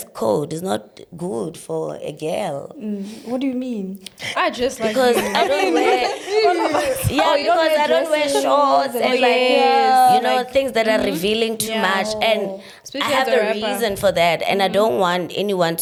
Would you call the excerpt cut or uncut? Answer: uncut